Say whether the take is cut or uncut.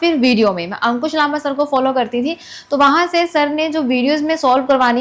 uncut